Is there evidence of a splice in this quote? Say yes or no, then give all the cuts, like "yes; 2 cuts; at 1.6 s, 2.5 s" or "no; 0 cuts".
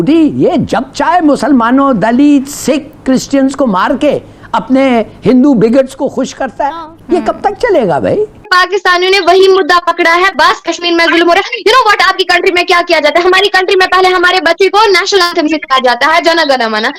no; 0 cuts